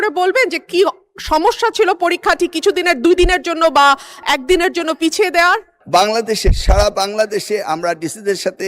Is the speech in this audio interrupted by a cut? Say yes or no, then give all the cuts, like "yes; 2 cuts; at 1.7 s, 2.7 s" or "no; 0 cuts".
yes; 1 cut; at 5.7 s